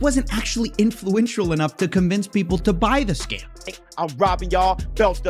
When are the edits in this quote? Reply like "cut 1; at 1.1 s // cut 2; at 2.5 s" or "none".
cut 1; at 3.7 s